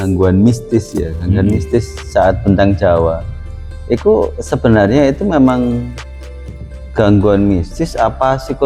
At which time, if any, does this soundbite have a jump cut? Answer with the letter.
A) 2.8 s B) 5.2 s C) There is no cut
C